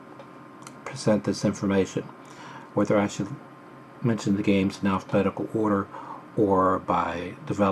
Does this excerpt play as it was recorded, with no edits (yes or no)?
no